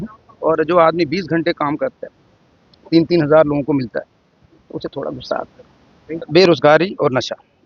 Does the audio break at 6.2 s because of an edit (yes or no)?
yes